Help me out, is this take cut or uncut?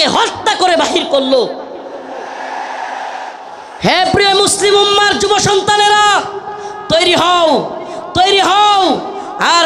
cut